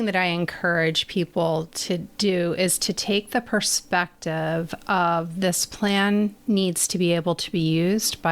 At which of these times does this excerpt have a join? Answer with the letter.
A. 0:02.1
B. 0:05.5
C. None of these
A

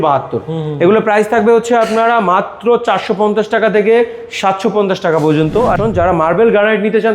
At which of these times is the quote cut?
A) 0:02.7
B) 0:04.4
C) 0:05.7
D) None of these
C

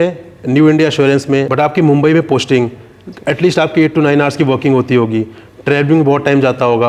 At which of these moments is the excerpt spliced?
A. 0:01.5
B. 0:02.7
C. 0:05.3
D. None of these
A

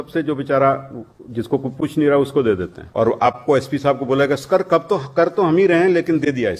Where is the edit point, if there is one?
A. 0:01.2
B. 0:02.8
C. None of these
B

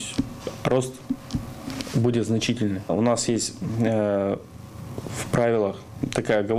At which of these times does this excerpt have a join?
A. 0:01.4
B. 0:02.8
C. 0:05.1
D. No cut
D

